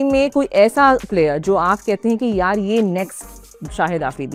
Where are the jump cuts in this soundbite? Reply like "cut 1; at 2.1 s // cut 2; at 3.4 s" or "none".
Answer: none